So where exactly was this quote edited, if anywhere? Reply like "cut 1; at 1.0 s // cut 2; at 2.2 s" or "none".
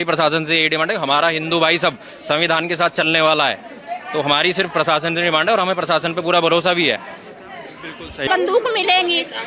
cut 1; at 8.2 s